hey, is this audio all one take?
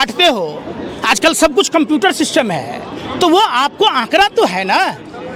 yes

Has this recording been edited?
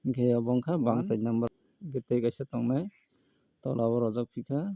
yes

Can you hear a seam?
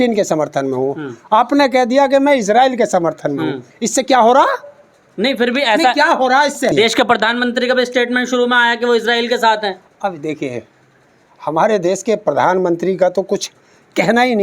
yes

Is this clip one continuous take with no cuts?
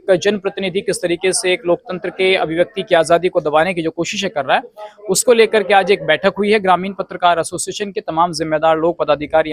yes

